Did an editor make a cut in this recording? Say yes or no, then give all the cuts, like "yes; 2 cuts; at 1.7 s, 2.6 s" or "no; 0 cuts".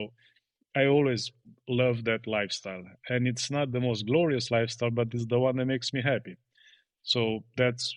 no; 0 cuts